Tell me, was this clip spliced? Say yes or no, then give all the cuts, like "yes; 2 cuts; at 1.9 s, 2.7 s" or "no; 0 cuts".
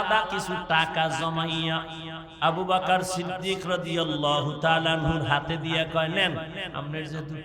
no; 0 cuts